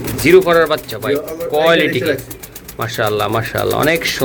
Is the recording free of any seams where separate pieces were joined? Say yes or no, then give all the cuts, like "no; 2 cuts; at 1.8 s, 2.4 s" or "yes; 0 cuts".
yes; 0 cuts